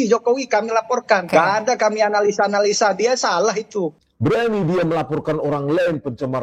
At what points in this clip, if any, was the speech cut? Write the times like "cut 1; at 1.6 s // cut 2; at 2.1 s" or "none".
cut 1; at 3.9 s

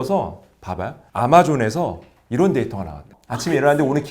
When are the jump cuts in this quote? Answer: cut 1; at 3.1 s

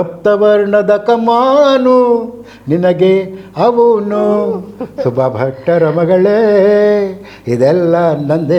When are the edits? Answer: none

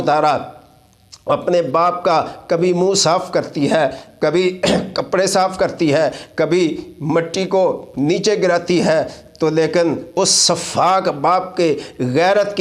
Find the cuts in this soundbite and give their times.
none

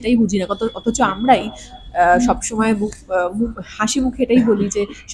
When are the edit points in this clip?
none

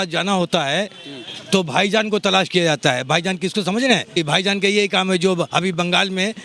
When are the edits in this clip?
cut 1; at 4.2 s

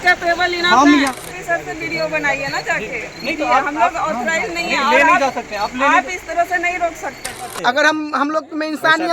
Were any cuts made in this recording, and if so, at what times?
cut 1; at 1.1 s // cut 2; at 7.5 s

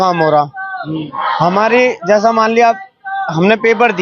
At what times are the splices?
none

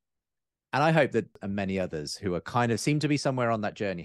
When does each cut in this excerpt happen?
cut 1; at 1.3 s

